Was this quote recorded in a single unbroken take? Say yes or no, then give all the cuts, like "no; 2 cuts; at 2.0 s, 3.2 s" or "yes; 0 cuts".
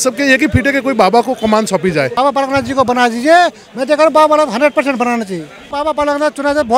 no; 2 cuts; at 2.1 s, 5.6 s